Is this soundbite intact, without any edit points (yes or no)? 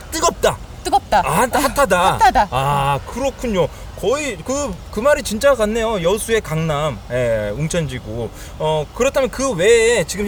yes